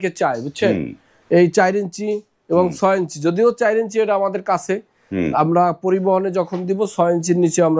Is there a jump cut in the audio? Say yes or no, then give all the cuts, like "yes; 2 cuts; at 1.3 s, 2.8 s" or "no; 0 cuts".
no; 0 cuts